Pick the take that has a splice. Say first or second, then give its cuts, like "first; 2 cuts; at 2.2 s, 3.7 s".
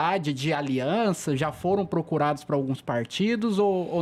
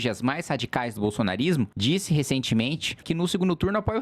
second; 2 cuts; at 1.7 s, 3.0 s